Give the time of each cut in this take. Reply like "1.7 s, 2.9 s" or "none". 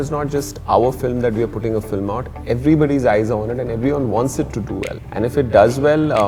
5.0 s